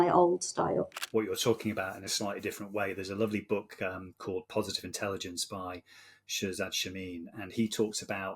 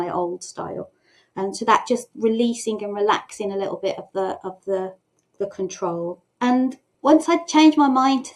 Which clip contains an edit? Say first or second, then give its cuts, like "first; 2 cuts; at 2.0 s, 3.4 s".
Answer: first; 1 cut; at 1.0 s